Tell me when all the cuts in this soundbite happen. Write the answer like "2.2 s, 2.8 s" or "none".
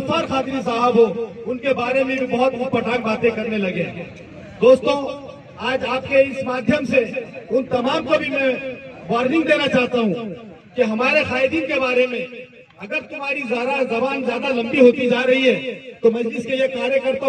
none